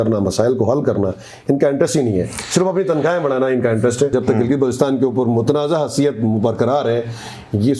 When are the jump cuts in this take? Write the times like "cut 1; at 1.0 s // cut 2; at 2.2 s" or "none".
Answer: cut 1; at 4.1 s